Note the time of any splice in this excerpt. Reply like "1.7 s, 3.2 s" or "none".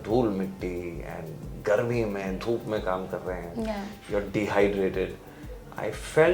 none